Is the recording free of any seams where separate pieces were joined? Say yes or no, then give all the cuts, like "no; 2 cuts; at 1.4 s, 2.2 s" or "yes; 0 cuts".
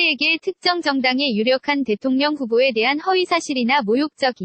yes; 0 cuts